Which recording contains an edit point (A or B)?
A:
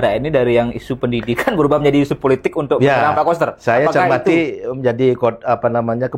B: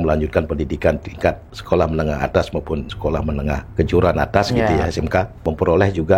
B